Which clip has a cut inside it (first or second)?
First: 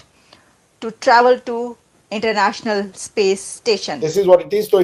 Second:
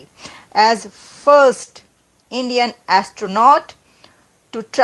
first